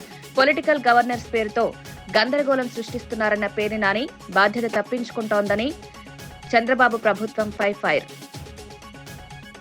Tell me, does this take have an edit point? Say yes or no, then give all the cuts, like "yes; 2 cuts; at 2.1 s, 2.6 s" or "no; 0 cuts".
no; 0 cuts